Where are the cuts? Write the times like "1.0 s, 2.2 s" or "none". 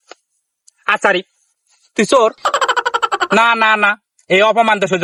none